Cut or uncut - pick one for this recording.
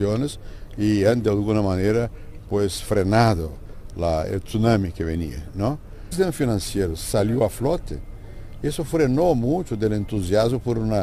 uncut